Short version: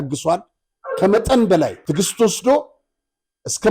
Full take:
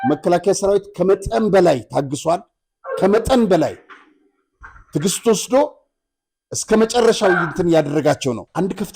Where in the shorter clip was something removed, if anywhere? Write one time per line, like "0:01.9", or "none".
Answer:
0:01.8